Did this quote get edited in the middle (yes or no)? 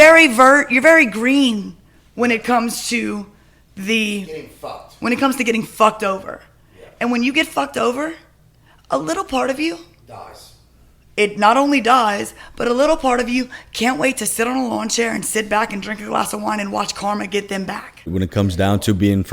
yes